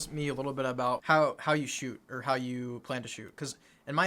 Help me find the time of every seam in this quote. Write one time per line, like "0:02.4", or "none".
0:01.0